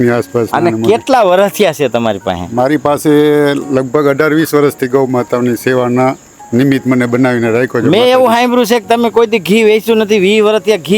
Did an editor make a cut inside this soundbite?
no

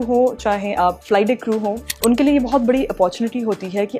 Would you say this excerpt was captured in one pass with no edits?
no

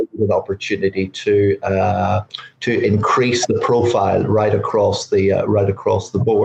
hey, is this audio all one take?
yes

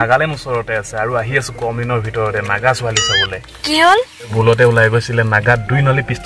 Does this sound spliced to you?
no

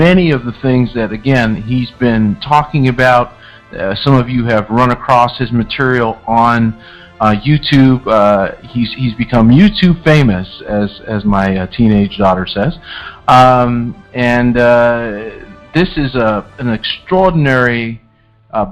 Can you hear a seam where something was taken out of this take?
no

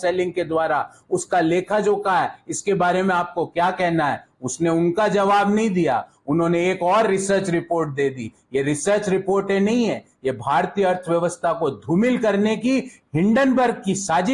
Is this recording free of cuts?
yes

